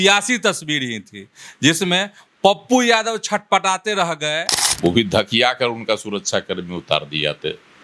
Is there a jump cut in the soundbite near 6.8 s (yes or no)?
no